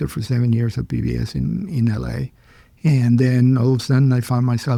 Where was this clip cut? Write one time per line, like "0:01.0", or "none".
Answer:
none